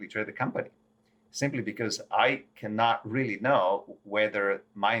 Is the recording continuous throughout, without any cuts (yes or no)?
yes